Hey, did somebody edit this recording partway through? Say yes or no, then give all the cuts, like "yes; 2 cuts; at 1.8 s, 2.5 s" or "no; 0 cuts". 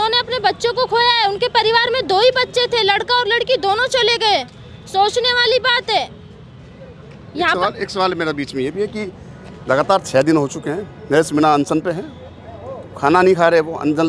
no; 0 cuts